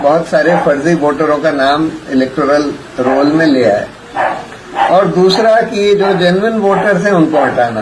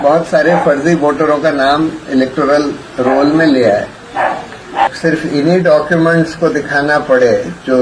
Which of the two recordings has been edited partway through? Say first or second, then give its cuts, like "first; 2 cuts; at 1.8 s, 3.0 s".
second; 1 cut; at 4.9 s